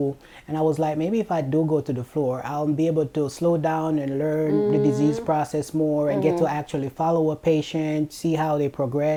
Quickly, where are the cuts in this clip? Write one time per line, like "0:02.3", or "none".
none